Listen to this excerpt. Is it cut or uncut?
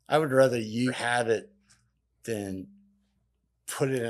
cut